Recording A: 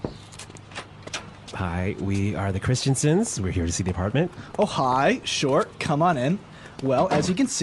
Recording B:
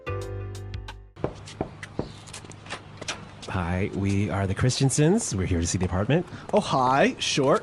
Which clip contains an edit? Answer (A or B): B